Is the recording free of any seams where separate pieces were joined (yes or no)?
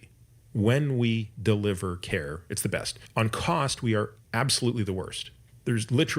no